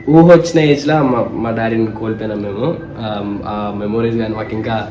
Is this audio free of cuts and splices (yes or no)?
yes